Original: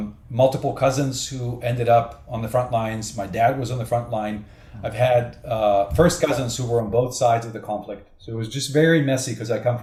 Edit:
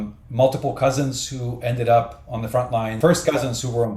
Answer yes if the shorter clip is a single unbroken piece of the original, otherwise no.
no